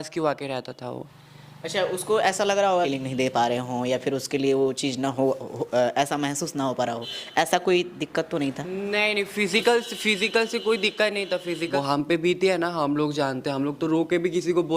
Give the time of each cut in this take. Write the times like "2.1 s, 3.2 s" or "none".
1.1 s, 2.9 s, 11.6 s

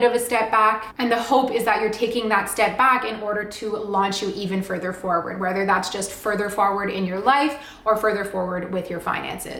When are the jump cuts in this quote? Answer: none

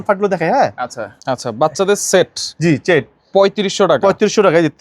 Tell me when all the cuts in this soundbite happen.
1.1 s

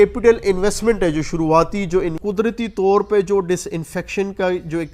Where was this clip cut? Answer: 2.2 s

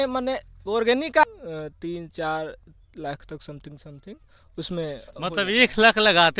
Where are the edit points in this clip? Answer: 1.2 s

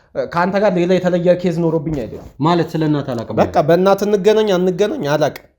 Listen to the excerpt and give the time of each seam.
2.2 s

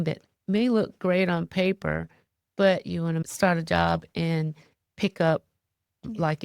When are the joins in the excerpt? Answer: 3.2 s

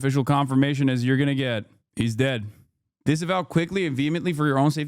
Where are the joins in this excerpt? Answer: 2.9 s

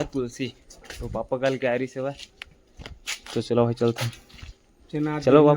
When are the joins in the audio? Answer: none

